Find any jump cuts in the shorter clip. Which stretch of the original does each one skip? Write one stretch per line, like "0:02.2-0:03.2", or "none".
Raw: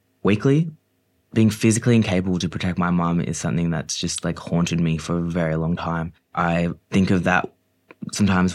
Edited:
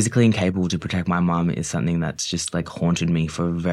none

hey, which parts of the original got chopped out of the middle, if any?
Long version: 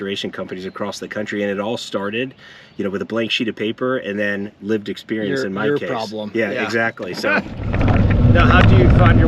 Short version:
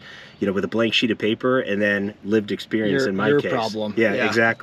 none

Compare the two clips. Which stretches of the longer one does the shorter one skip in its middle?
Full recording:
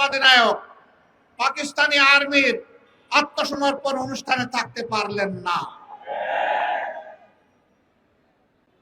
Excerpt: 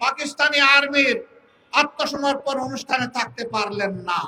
none

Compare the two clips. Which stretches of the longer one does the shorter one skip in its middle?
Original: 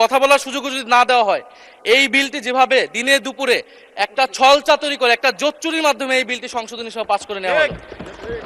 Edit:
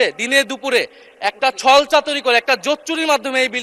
none

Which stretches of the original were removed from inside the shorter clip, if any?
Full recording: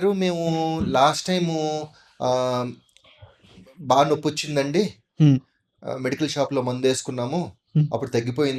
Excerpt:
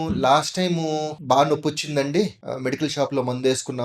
0:01.9-0:03.7
0:05.0-0:05.8

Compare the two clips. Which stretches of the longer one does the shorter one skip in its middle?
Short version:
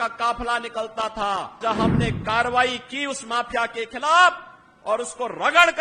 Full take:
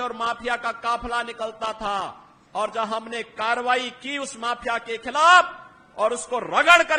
0:02.2-0:02.7

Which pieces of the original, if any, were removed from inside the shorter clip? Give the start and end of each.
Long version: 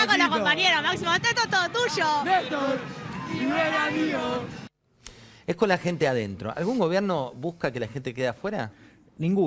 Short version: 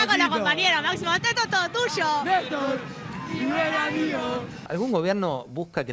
0:04.6-0:06.5

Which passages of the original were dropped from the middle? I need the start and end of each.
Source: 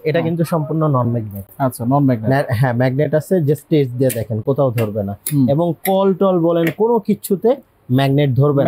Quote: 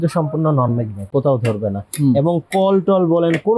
0:01.4-0:04.3

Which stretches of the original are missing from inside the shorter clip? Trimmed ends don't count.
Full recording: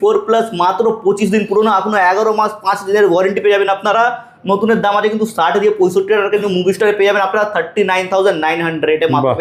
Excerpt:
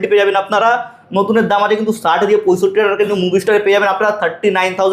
none

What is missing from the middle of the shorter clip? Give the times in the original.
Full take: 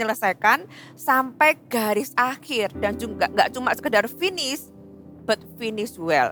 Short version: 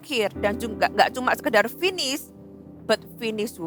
none

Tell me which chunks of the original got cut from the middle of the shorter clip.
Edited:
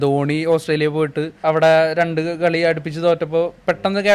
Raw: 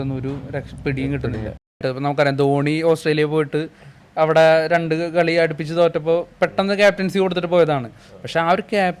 0:03.6-0:04.0

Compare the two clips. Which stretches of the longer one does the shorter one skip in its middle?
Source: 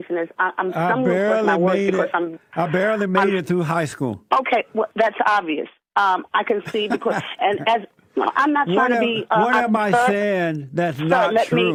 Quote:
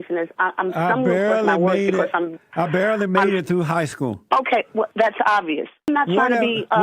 0:05.9-0:08.5

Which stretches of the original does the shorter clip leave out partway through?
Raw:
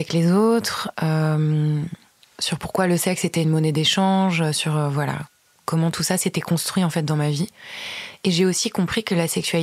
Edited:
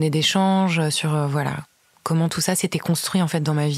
none

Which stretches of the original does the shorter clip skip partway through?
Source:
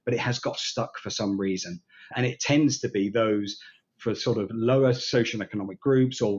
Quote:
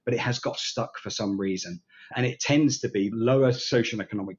0:03.1-0:04.5

